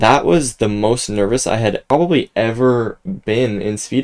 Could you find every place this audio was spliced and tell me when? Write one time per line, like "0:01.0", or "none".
none

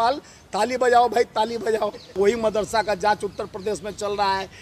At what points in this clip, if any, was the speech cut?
0:02.1

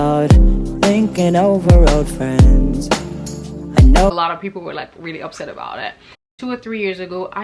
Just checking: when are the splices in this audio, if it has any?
0:04.1
0:06.3

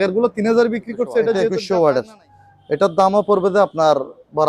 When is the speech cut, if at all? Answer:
0:01.4

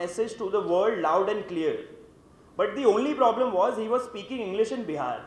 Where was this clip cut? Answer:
none

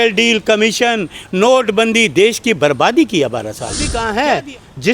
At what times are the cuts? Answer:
0:04.0

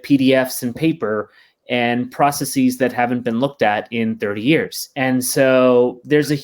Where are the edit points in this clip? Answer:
0:04.8

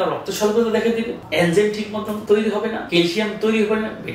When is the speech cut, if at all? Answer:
0:01.2
0:02.2
0:02.8

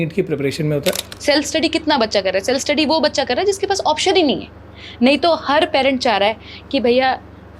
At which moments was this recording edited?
0:01.1

